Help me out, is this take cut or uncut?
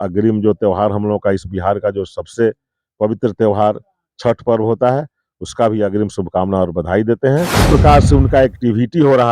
cut